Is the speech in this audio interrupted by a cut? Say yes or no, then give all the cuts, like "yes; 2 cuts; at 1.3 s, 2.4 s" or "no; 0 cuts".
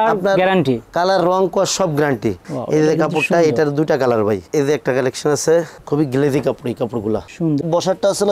yes; 2 cuts; at 2.4 s, 7.6 s